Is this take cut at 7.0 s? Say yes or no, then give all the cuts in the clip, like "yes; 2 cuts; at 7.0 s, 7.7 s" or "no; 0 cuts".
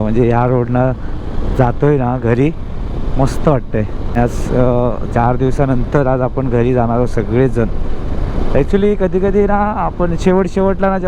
no; 1 cut; at 4.2 s